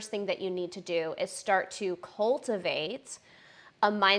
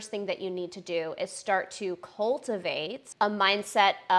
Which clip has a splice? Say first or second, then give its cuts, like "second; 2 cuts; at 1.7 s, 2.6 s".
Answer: second; 1 cut; at 3.0 s